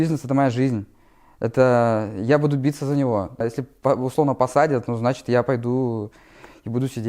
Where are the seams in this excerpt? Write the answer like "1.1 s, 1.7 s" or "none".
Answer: 3.4 s